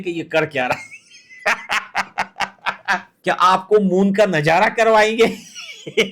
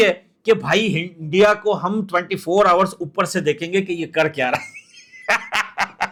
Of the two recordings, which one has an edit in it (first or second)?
first